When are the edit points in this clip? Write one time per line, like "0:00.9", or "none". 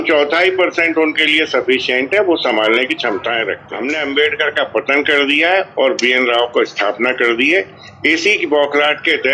0:03.7